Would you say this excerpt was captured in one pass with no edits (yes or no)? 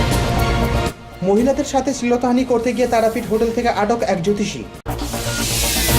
no